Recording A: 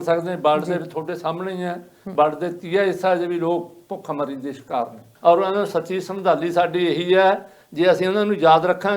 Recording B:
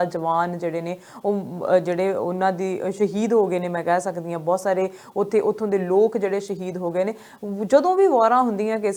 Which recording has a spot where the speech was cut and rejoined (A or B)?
A